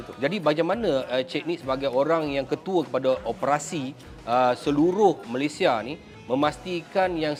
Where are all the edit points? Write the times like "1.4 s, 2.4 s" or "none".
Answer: none